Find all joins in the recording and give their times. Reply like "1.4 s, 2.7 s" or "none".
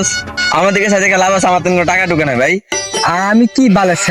2.8 s